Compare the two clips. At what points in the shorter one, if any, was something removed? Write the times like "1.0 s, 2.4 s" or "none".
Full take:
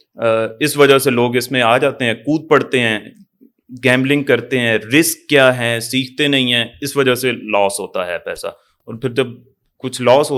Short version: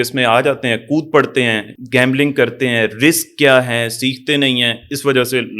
1.7 s